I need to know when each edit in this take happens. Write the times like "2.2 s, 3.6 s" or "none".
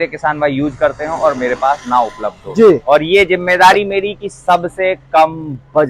none